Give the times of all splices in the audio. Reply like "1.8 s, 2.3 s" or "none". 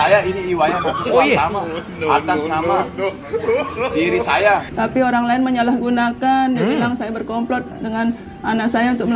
4.7 s

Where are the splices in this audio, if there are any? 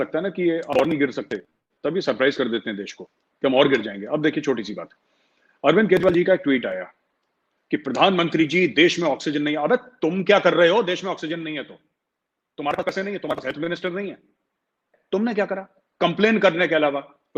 14.9 s

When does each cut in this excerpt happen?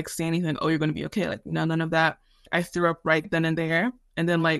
2.5 s

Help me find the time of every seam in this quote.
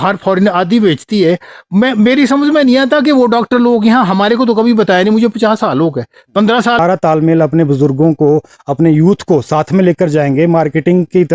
6.8 s

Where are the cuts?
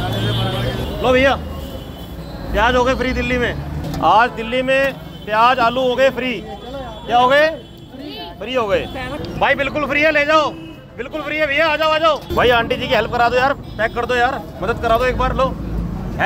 0.8 s, 3.8 s, 9.2 s, 12.3 s

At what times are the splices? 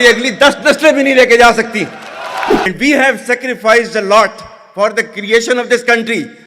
2.7 s

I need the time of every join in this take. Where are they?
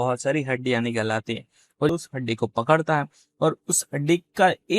1.9 s

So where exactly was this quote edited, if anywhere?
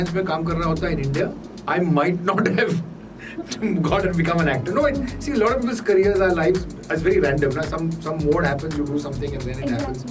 1.5 s

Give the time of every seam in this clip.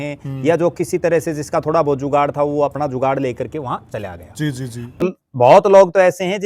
5.0 s

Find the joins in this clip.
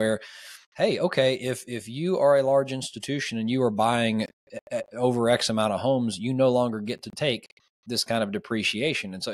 none

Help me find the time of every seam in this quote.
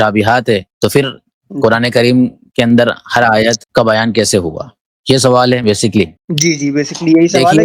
none

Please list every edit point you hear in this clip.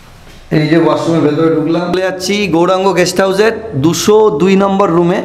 1.9 s

